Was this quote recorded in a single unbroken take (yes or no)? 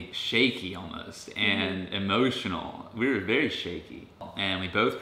yes